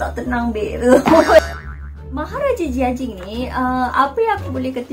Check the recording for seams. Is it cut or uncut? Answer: uncut